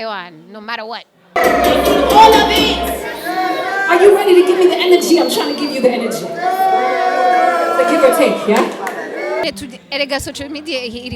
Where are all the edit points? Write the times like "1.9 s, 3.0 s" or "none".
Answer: 1.2 s, 9.4 s

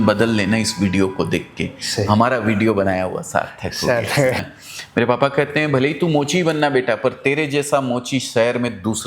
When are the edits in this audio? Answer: 4.4 s

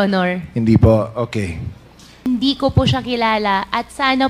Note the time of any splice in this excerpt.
2.2 s

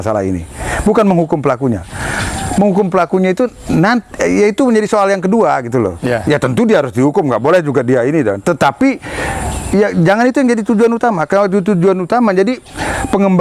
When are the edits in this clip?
none

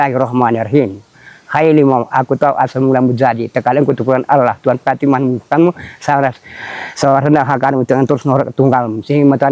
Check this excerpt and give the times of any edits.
none

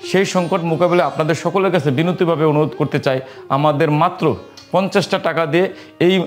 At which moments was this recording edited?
none

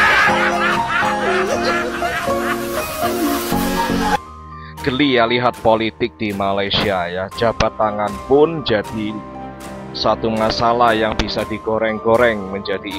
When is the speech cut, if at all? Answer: none

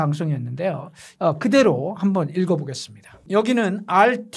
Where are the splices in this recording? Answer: 1.0 s, 3.2 s

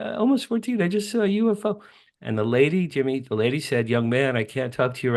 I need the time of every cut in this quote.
none

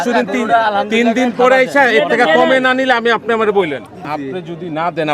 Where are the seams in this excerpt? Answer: 4.1 s

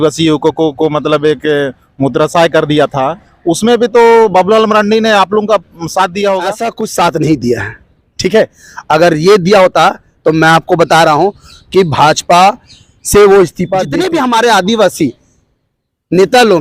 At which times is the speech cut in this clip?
6.7 s, 13.8 s

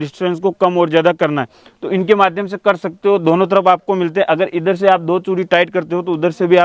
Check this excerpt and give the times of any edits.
none

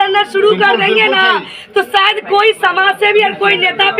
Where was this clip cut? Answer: none

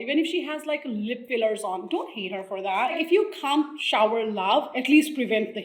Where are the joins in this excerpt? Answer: 1.2 s, 2.9 s, 3.8 s, 4.7 s

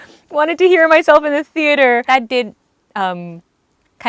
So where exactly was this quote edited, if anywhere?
2.0 s

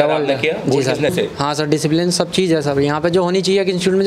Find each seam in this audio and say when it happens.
1.1 s

